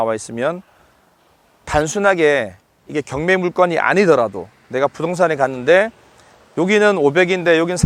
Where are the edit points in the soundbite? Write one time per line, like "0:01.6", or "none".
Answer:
none